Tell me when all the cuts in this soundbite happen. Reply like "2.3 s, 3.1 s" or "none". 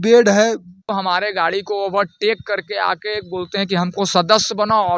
0.9 s